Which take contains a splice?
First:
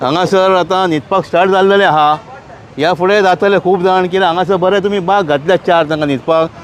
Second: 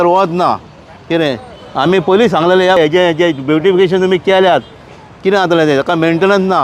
second; 1 cut; at 2.8 s

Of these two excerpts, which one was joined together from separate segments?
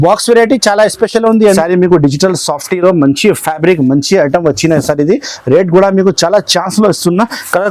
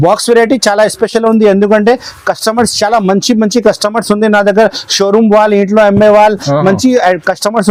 first; 1 cut; at 1.6 s

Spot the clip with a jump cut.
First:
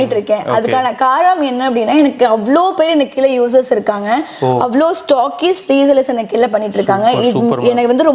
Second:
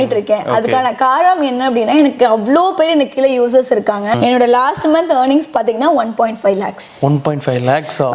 second; 1 cut; at 4.2 s

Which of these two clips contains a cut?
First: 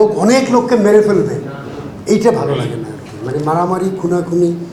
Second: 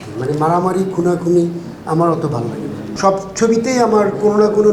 second; 1 cut; at 2.8 s

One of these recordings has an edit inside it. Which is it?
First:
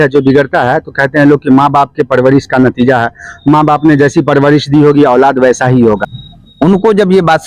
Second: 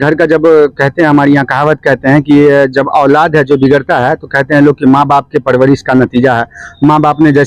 first; 1 cut; at 6.1 s

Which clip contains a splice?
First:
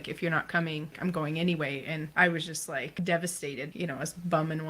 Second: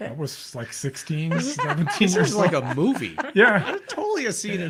first; 4 cuts; at 0.9 s, 2.1 s, 2.9 s, 3.7 s

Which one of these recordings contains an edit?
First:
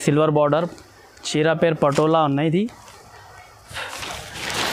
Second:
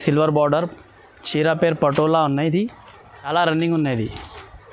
second; 1 cut; at 3.3 s

